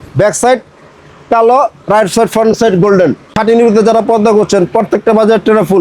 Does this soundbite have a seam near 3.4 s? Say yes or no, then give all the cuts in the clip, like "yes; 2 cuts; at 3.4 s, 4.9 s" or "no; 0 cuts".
yes; 1 cut; at 3.4 s